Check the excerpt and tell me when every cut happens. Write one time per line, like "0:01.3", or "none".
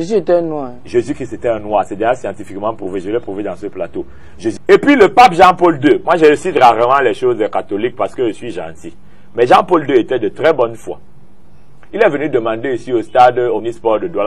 0:04.5